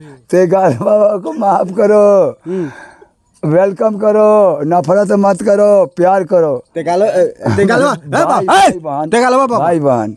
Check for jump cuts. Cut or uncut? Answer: uncut